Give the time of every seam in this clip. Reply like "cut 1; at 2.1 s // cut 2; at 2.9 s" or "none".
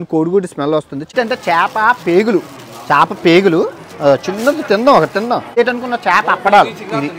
cut 1; at 1.1 s // cut 2; at 5.6 s